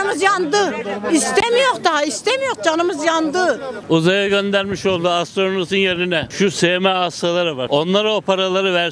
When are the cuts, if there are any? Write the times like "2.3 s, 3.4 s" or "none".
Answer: 3.7 s, 6.3 s, 7.6 s